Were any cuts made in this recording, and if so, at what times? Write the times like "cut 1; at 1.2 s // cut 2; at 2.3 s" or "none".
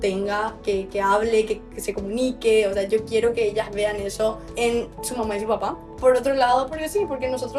cut 1; at 5.9 s

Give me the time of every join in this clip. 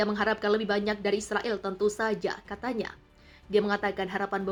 none

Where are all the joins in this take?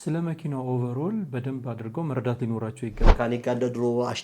cut 1; at 3.0 s

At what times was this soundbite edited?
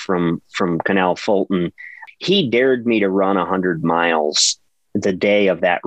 cut 1; at 2.0 s

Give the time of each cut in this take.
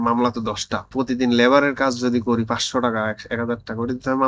cut 1; at 0.9 s

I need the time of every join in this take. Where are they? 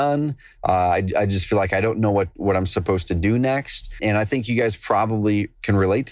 cut 1; at 4.0 s

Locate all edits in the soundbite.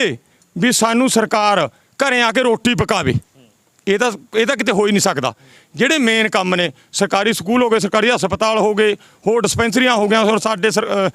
none

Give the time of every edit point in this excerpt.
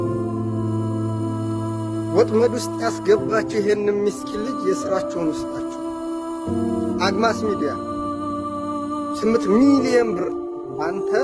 none

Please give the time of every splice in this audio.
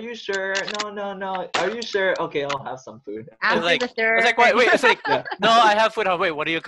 none

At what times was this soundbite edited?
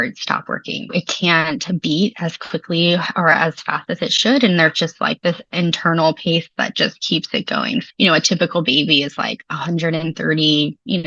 cut 1; at 0.9 s // cut 2; at 3.3 s // cut 3; at 7.9 s

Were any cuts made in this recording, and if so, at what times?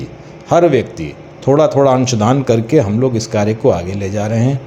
none

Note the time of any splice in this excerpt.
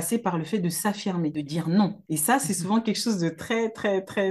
cut 1; at 1.3 s // cut 2; at 2.0 s

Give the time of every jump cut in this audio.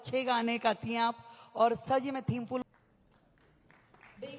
cut 1; at 2.6 s

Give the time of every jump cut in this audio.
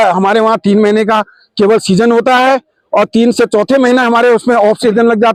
none

